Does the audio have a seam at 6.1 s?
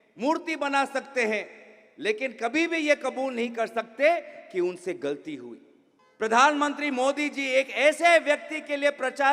yes; 1 cut; at 6.1 s

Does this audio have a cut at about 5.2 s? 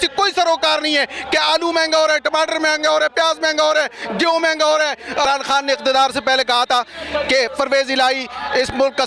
yes; 1 cut; at 5.2 s

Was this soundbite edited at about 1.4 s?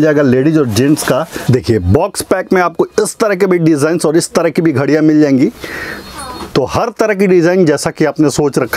yes; 1 cut; at 1.4 s

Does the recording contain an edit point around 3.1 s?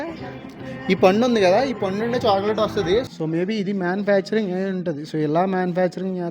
yes; 1 cut; at 3.1 s

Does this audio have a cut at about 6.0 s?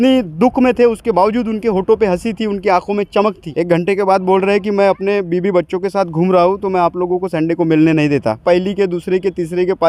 no; 2 cuts; at 3.5 s, 8.4 s

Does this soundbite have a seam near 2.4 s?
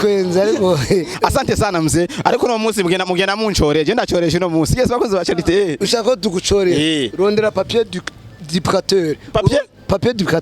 no; 1 cut; at 1.1 s

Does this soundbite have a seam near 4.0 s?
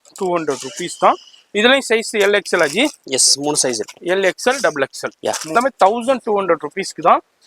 no; 1 cut; at 5.5 s

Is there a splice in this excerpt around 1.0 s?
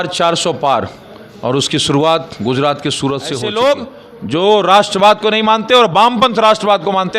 no; 1 cut; at 3.3 s

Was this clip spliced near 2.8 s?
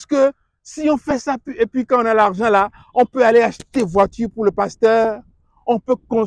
no; 0 cuts

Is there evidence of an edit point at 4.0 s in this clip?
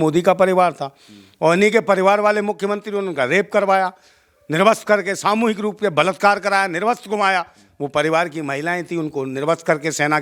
no; 0 cuts

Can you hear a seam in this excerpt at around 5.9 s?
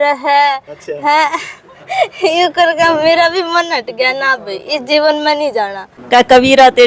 yes; 1 cut; at 5.9 s

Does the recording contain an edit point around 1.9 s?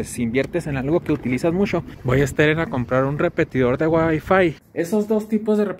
yes; 2 cuts; at 1.9 s, 4.6 s

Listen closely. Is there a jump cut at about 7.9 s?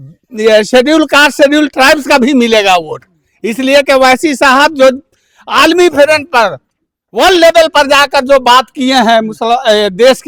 no; 0 cuts

